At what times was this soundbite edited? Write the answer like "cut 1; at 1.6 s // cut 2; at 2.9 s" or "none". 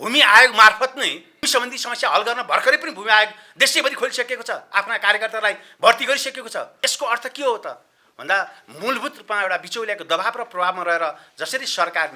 cut 1; at 1.4 s // cut 2; at 6.7 s